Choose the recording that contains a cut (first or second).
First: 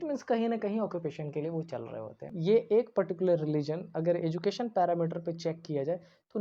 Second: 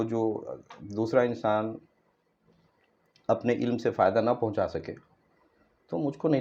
first